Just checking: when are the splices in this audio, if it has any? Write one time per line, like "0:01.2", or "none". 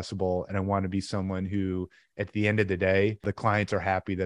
0:03.3